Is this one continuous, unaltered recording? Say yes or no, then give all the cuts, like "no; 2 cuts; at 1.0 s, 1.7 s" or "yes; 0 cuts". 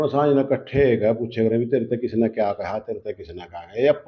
yes; 0 cuts